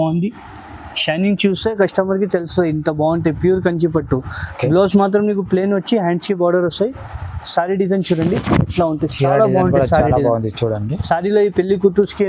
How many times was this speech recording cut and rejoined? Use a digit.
0